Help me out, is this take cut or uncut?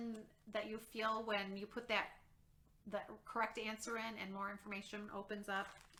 uncut